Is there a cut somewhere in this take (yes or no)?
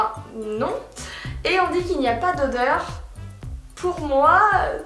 no